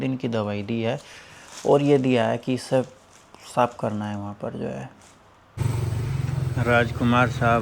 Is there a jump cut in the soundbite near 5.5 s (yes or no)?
yes